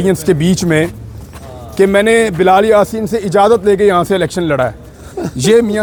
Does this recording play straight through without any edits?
yes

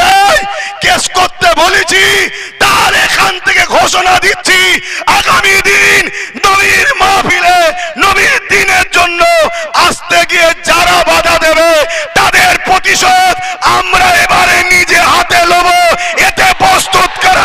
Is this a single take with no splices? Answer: yes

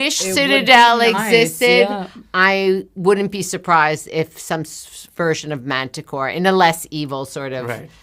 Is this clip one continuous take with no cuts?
yes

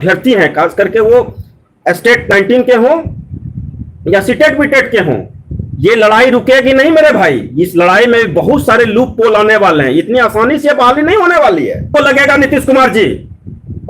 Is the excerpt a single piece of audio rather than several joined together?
no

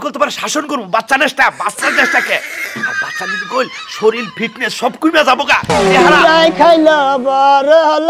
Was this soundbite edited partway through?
no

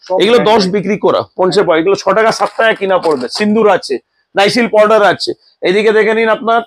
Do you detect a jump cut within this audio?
no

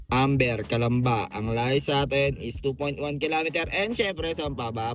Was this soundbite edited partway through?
no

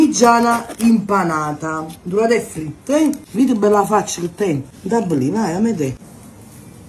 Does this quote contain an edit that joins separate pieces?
yes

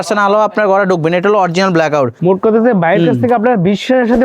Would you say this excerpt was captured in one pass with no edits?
no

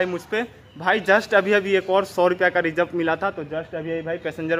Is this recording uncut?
yes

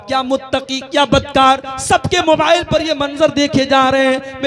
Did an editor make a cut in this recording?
no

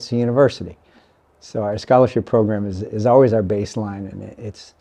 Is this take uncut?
yes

